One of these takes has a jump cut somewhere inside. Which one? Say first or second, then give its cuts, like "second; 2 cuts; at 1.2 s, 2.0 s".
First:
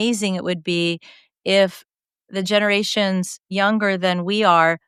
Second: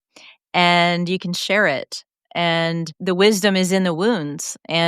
second; 1 cut; at 3.0 s